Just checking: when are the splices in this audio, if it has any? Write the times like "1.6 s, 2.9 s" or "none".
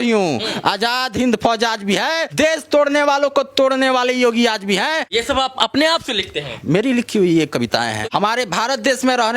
2.3 s, 5.0 s, 8.0 s

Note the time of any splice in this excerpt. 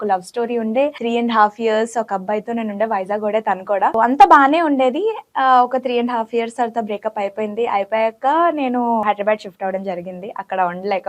1.0 s, 3.9 s, 9.0 s

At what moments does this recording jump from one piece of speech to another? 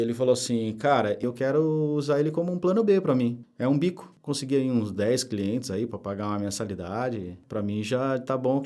1.2 s

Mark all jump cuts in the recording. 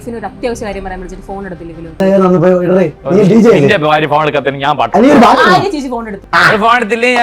2.0 s, 6.2 s

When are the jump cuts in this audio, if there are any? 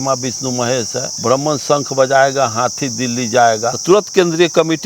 1.0 s, 3.8 s

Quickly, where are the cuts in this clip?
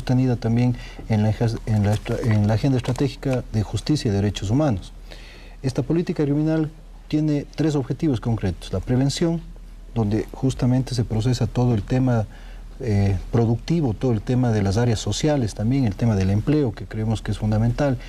11.5 s

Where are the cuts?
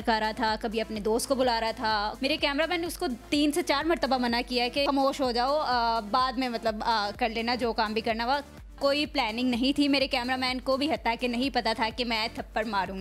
2.1 s, 4.8 s, 8.6 s

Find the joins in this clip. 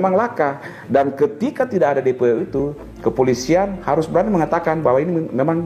none

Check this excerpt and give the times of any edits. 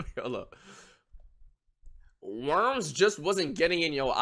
none

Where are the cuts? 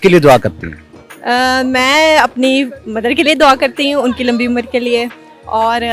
none

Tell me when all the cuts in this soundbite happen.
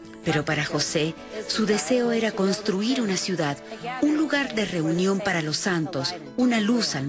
2.3 s

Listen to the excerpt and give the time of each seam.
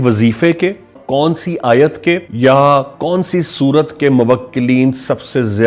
1.0 s, 2.3 s

